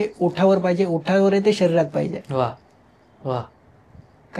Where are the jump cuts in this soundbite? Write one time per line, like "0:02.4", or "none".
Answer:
none